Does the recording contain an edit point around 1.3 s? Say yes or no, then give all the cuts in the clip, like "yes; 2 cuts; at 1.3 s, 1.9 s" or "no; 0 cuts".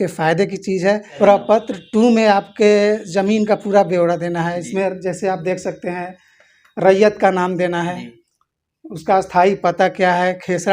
yes; 1 cut; at 1.3 s